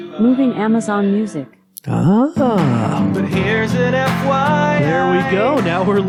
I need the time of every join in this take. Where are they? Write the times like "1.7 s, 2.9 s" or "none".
none